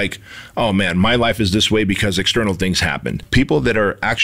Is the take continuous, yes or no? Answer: no